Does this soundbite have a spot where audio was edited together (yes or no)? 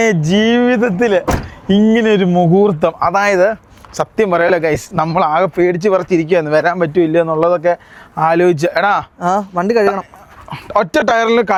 no